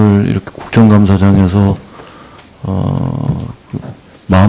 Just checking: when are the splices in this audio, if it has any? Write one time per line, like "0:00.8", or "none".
none

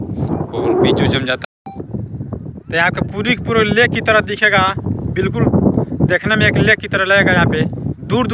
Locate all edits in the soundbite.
0:01.4

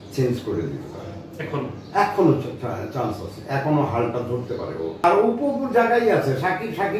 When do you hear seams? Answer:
0:05.0

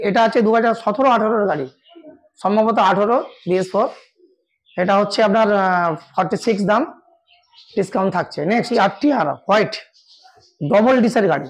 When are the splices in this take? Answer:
0:08.7

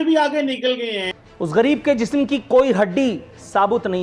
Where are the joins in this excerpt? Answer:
0:01.2

